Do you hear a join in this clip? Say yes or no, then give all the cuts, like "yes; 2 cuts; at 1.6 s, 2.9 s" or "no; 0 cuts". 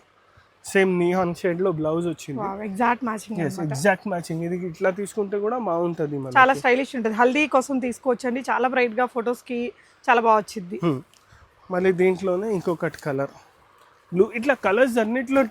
no; 0 cuts